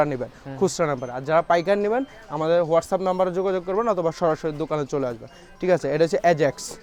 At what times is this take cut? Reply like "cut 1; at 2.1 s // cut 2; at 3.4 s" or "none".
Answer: none